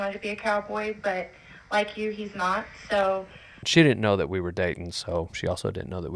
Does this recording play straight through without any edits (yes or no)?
no